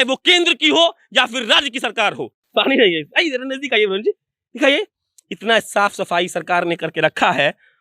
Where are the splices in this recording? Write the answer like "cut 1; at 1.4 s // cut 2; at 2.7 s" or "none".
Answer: cut 1; at 2.3 s